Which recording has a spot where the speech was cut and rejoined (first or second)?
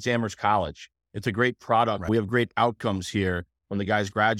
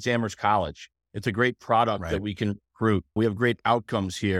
first